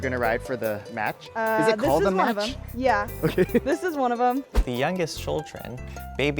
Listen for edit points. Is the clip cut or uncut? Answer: cut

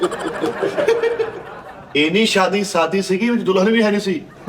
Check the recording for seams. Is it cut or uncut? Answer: cut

